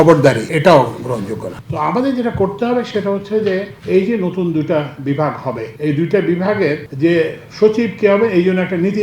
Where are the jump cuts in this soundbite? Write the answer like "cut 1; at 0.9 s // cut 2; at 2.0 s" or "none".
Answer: cut 1; at 1.6 s // cut 2; at 5.7 s